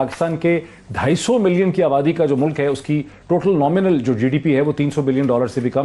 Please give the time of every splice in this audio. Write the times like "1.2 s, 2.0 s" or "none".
none